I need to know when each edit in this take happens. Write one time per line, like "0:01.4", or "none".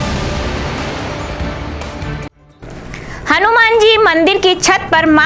0:02.4